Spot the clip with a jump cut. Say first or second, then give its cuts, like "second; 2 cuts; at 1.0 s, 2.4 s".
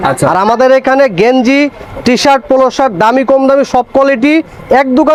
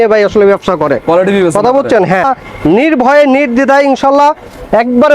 second; 1 cut; at 2.2 s